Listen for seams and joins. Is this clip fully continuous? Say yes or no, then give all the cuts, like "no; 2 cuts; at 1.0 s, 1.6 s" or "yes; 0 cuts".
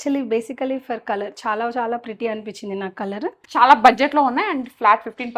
no; 1 cut; at 3.5 s